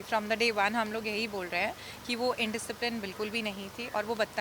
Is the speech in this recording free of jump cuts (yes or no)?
yes